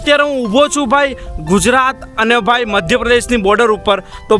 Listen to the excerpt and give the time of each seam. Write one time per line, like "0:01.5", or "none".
none